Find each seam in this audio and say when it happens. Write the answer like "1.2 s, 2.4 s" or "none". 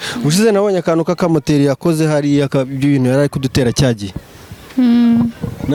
none